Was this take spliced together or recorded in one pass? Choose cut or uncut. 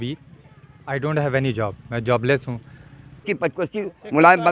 cut